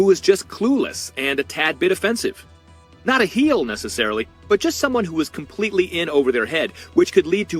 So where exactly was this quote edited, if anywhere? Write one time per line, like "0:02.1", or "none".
none